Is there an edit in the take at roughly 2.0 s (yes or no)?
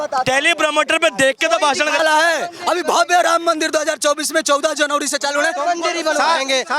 yes